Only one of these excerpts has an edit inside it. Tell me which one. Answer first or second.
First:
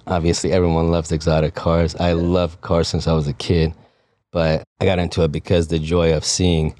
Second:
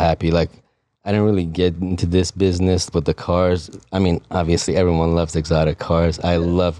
first